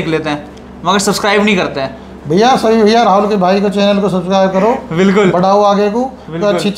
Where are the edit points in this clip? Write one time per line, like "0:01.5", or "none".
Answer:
none